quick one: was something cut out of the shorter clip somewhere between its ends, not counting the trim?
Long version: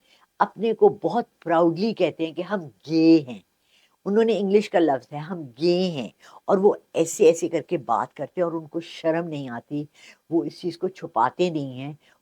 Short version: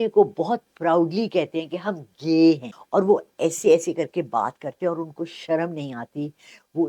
yes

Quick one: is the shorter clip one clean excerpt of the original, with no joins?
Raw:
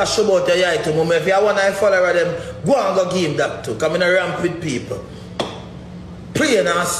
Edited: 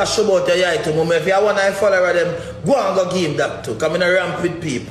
yes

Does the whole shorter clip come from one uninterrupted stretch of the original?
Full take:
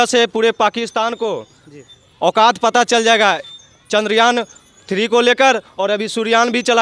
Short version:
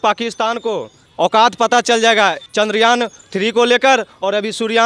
no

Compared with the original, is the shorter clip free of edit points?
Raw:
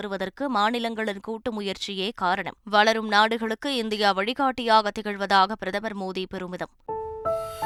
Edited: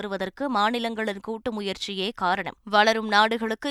yes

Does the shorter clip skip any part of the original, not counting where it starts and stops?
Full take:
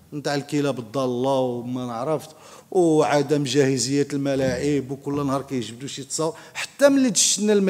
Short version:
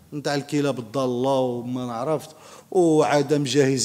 no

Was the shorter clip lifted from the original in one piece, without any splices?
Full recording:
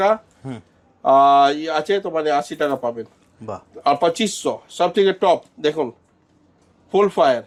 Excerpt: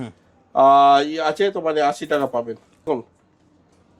no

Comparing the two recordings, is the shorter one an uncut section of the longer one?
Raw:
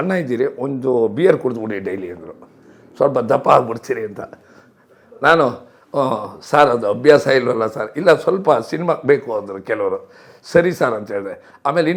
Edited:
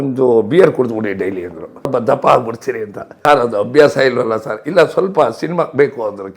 no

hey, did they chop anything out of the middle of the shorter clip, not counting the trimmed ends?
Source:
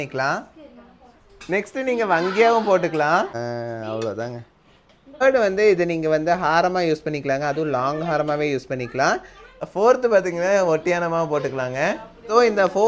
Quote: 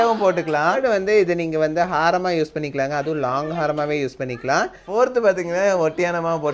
yes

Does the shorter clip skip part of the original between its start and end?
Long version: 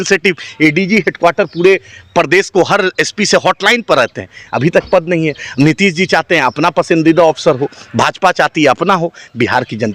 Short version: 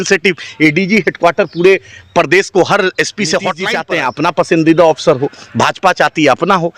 yes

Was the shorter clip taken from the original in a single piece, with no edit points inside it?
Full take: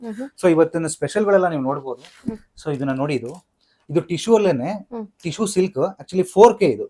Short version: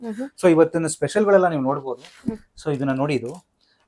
yes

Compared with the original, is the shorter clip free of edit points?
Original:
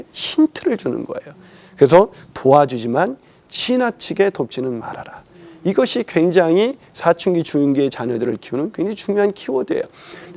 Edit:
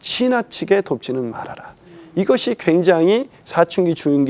yes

